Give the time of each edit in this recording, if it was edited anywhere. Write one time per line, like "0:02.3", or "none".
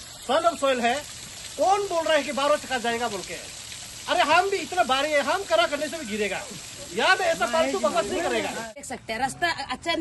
0:08.9